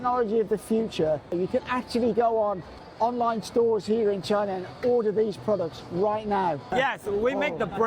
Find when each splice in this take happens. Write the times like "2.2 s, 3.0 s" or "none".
1.3 s, 6.7 s